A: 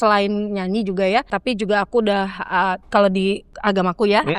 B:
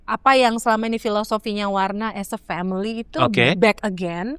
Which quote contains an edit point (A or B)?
A